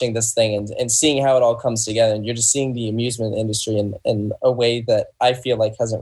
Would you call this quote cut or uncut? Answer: uncut